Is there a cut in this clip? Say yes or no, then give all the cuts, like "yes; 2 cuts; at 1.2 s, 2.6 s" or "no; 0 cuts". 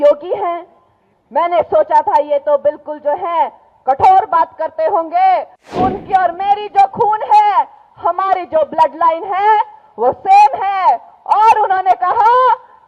yes; 1 cut; at 5.7 s